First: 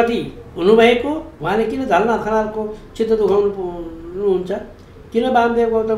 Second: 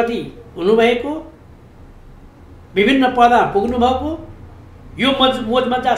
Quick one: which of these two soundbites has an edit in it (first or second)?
first